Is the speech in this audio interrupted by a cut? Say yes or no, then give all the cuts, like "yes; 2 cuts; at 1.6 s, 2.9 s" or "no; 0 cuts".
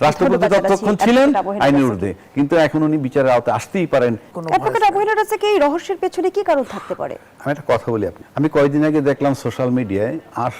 yes; 2 cuts; at 4.3 s, 8.2 s